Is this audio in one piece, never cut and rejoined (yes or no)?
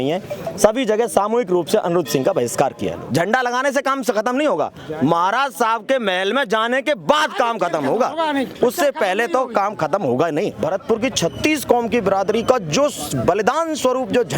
no